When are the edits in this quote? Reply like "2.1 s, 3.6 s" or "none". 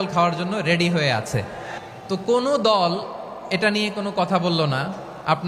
1.8 s